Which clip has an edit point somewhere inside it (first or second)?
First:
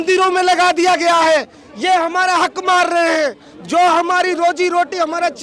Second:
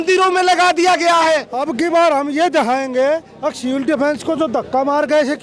second